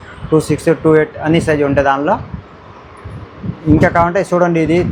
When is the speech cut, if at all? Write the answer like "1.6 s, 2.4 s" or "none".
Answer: none

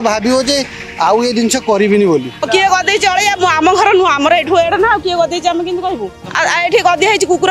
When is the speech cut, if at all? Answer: 2.5 s, 6.2 s

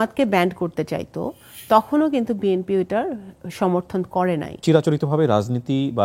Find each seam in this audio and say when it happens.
4.6 s

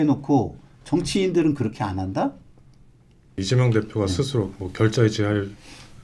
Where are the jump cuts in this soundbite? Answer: 3.4 s

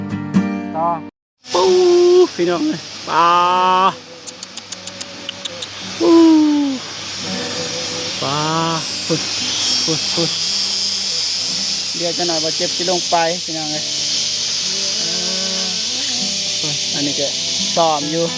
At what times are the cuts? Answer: 1.2 s

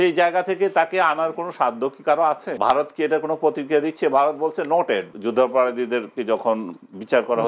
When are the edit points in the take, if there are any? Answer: 2.5 s, 5.2 s

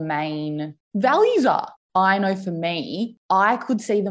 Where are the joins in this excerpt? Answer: 1.8 s, 3.1 s

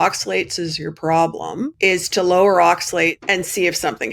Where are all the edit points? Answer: 1.7 s, 3.2 s

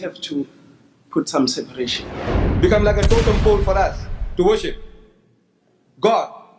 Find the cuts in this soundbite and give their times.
2.0 s

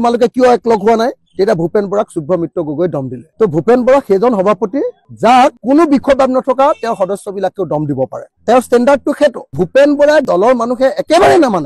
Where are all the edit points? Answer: 9.5 s, 10.3 s

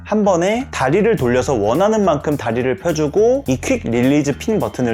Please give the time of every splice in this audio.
3.4 s

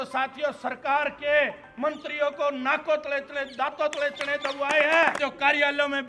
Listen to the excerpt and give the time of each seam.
5.2 s

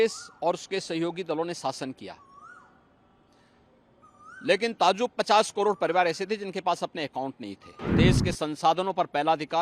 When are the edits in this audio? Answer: 7.9 s

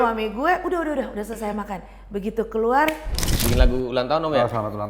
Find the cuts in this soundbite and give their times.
3.4 s

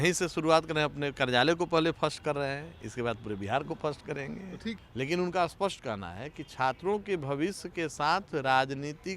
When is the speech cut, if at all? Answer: 4.8 s

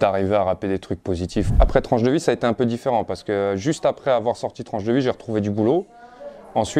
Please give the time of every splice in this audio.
1.5 s

